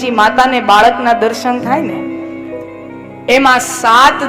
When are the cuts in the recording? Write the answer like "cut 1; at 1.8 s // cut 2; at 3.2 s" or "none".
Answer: none